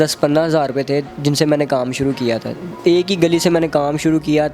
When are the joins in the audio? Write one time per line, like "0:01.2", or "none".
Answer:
0:01.1
0:02.7